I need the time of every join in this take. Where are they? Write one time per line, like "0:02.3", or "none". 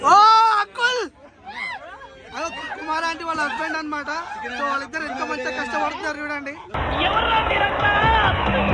none

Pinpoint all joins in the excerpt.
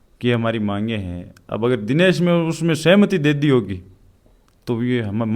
none

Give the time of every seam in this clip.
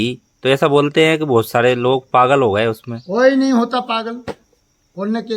none

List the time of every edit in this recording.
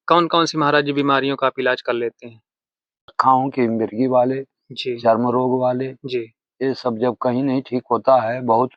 0:03.2

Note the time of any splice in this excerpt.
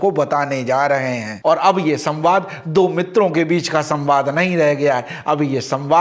none

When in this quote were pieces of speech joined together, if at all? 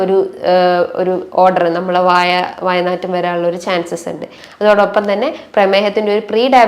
0:04.4

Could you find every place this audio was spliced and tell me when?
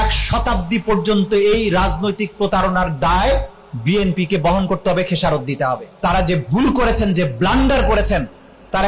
0:05.9

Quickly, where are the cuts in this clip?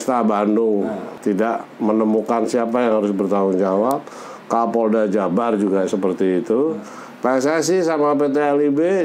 0:01.1

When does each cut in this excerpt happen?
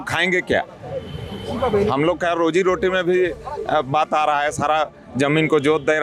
none

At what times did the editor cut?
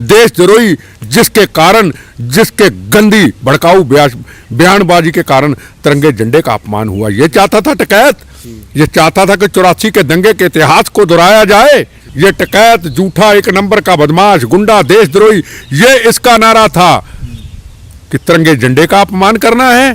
0:12.0

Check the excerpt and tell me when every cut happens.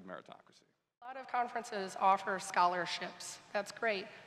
0:01.1

